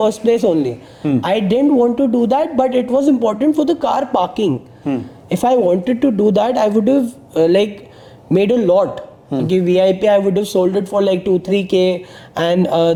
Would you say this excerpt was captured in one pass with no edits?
yes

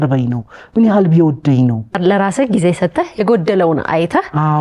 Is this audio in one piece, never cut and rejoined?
no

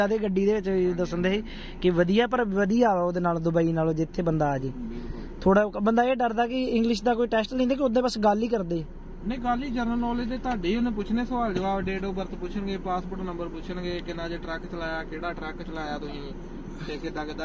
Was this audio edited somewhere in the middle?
no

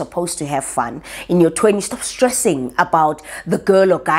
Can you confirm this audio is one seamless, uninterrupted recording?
yes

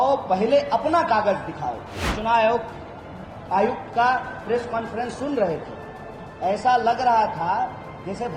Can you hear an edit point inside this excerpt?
yes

